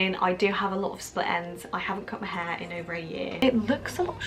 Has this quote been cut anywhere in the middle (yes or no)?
yes